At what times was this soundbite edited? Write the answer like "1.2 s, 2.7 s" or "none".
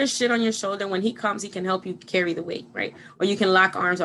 none